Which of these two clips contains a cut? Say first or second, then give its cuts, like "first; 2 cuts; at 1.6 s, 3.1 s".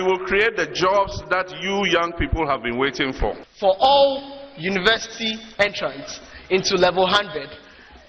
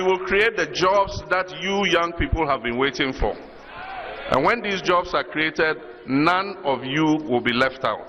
first; 1 cut; at 3.5 s